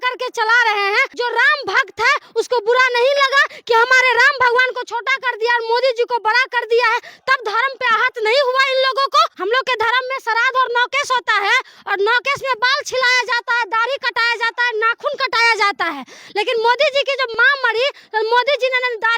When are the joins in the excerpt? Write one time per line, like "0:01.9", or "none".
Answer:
0:01.1
0:09.3
0:17.3